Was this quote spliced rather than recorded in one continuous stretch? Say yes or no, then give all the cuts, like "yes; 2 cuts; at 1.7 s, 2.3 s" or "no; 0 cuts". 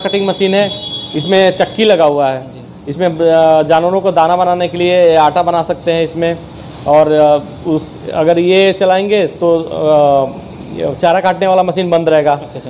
no; 0 cuts